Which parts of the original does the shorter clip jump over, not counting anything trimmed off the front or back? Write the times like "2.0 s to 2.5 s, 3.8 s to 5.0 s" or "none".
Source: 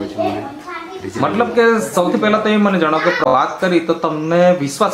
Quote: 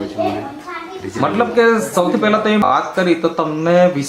2.7 s to 3.3 s